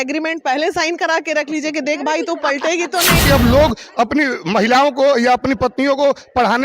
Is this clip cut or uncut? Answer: cut